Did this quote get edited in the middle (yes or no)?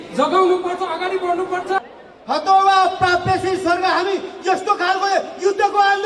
yes